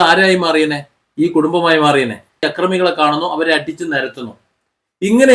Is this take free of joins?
no; 1 cut; at 2.5 s

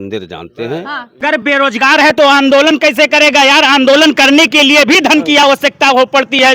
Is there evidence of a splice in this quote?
yes; 1 cut; at 1.1 s

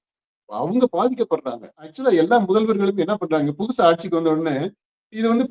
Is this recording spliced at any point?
yes; 1 cut; at 1.8 s

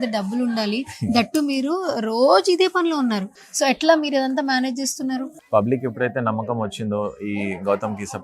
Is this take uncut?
no; 2 cuts; at 3.4 s, 5.3 s

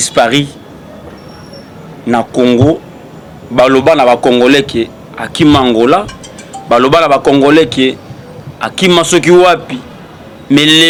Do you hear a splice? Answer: no; 0 cuts

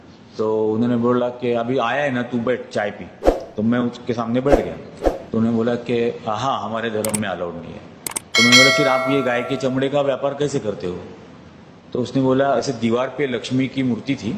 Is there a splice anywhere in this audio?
no; 0 cuts

